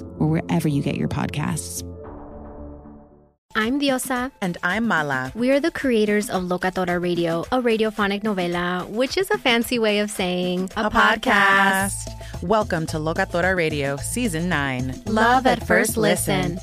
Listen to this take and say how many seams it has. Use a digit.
1